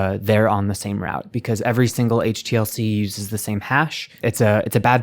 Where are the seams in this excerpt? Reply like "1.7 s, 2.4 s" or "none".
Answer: 4.1 s